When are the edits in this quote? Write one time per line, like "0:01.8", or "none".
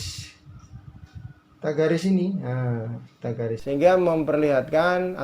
0:03.6

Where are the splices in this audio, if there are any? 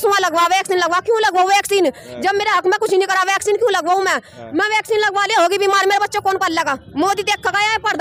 none

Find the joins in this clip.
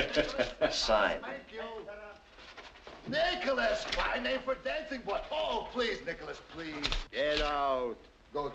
0:06.3

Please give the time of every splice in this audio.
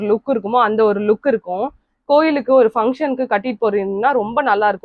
none

